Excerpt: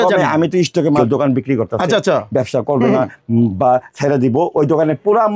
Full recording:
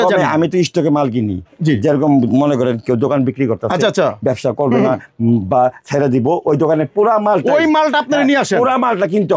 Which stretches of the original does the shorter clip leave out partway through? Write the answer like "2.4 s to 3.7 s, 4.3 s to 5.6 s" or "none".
1.0 s to 2.9 s

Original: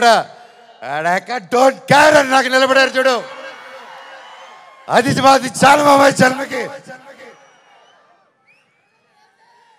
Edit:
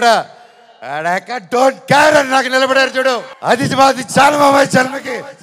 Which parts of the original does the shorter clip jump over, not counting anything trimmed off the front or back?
3.3 s to 4.8 s

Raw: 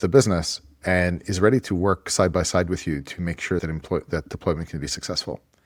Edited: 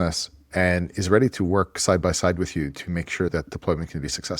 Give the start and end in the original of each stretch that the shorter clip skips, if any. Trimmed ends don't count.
3.6 s to 4.1 s

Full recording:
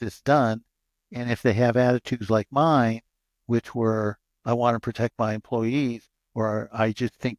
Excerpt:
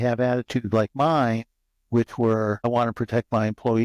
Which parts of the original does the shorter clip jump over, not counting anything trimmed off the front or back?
4.2 s to 4.5 s

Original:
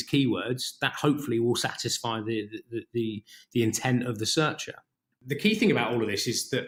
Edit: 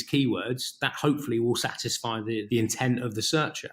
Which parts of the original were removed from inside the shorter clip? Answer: 2.5 s to 3.5 s

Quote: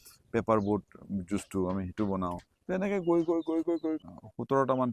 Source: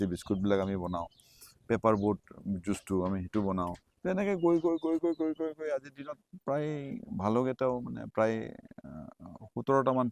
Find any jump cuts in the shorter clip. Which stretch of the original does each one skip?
5.4 s to 9.2 s

